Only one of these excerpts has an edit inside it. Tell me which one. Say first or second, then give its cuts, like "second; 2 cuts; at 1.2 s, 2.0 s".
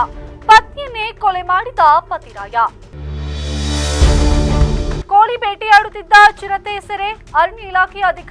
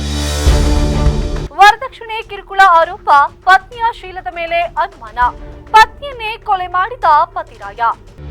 second; 1 cut; at 1.4 s